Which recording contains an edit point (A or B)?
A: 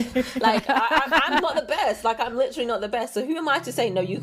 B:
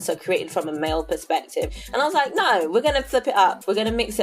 B